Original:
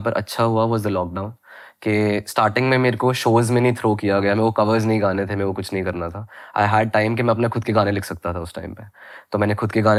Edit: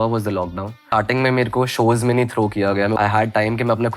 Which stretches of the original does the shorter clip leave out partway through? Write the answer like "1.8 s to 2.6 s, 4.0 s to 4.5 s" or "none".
1.4 s to 2.3 s, 4.4 s to 6.5 s